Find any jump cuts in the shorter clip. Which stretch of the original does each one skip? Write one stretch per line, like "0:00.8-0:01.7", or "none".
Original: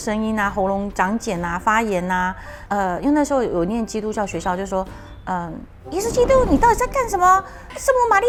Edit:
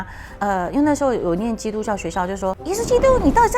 0:04.9-0:05.9